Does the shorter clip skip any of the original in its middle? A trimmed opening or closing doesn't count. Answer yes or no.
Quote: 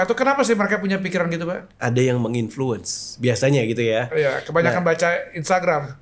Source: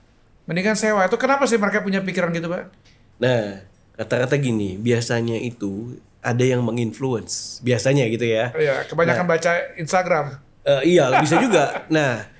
yes